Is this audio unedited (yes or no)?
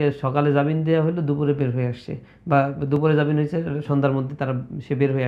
yes